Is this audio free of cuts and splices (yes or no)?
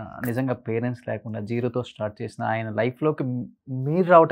yes